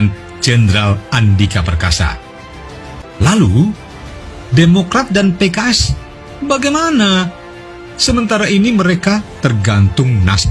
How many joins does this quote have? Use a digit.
1